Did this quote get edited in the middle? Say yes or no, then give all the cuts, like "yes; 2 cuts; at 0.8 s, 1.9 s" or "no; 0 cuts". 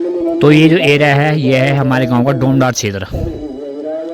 no; 0 cuts